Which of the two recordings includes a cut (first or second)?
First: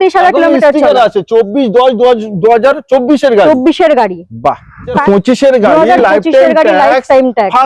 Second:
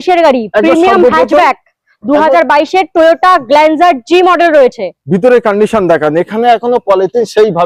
first